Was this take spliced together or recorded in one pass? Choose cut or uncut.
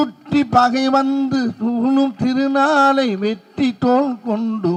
uncut